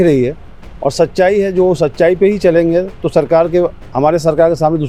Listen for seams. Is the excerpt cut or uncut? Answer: uncut